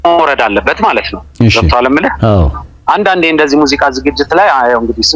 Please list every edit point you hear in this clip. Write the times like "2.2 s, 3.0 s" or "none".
none